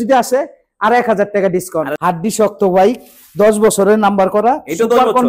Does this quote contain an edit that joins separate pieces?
yes; 1 cut; at 1.9 s

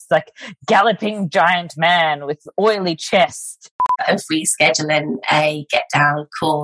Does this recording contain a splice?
yes; 1 cut; at 3.9 s

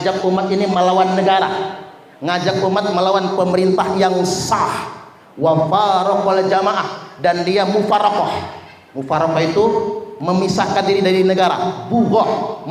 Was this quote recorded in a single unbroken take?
yes; 0 cuts

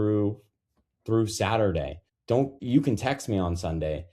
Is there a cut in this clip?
yes; 1 cut; at 2.4 s

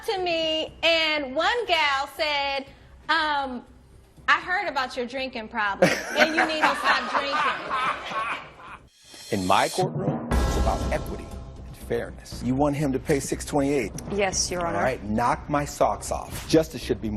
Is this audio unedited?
no; 1 cut; at 8.7 s

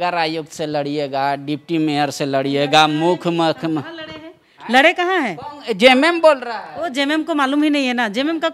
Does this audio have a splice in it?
no; 0 cuts

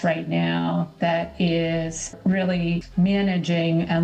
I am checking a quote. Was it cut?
yes; 1 cut; at 2.5 s

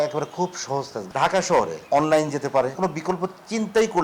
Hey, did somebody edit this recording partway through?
yes; 3 cuts; at 1.0 s, 1.8 s, 2.8 s

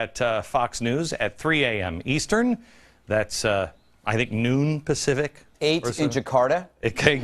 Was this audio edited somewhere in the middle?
yes; 1 cut; at 2.6 s

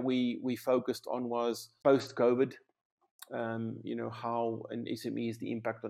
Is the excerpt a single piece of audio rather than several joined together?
no; 1 cut; at 1.7 s

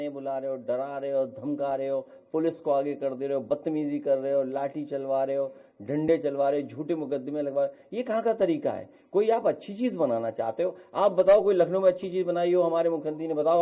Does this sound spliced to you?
no; 0 cuts

